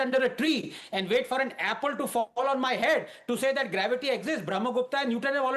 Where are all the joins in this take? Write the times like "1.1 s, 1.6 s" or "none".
none